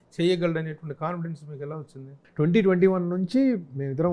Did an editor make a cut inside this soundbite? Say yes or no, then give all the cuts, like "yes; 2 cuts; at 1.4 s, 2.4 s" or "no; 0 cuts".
yes; 1 cut; at 2.1 s